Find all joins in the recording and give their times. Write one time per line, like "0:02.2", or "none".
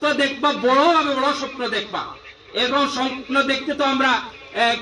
none

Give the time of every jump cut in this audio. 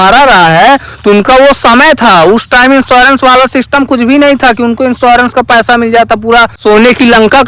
0:06.5

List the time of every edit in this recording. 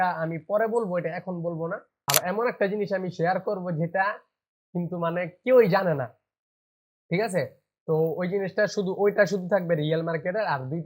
0:01.9

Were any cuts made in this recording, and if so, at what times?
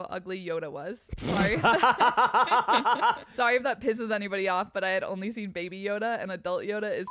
0:03.3

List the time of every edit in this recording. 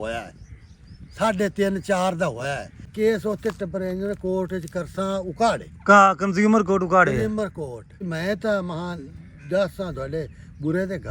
0:02.9
0:08.0

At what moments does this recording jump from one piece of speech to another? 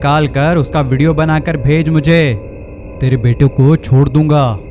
none

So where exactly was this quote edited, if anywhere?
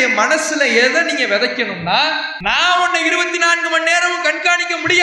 0:02.3

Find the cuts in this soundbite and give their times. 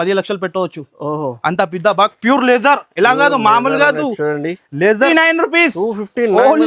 0:05.1

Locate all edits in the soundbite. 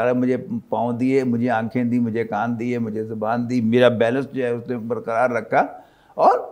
none

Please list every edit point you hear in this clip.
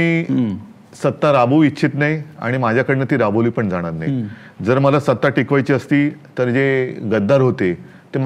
none

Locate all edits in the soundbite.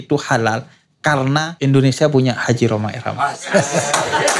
0:01.5

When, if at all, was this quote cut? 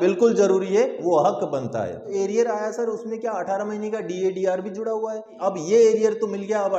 0:02.1
0:05.3

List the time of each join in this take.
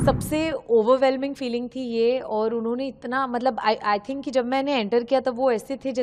none

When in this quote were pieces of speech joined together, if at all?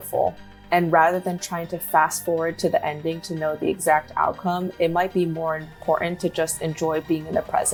none

